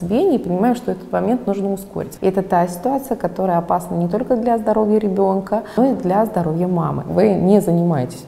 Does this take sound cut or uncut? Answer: cut